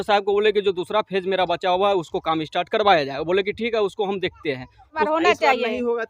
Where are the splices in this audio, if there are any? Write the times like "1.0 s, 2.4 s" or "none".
4.9 s

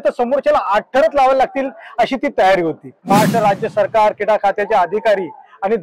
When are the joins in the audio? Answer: 2.9 s

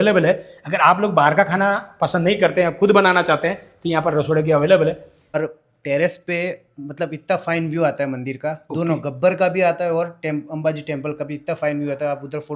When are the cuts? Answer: 5.4 s

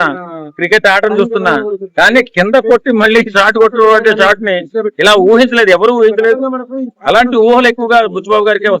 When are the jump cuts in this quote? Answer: none

